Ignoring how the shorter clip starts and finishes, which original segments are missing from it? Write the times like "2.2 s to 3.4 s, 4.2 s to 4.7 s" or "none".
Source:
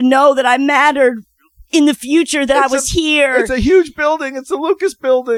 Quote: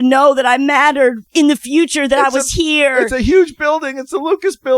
1.2 s to 1.6 s